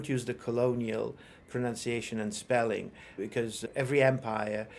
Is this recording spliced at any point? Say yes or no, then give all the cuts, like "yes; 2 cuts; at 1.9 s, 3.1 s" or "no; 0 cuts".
no; 0 cuts